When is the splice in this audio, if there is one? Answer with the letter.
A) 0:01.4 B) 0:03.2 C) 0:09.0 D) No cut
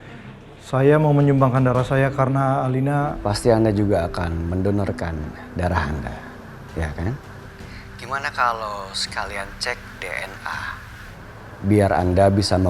B